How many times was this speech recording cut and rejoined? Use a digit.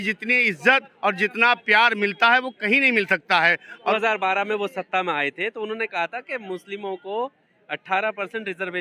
1